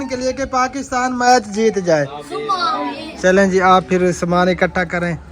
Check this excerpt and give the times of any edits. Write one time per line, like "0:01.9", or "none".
0:03.1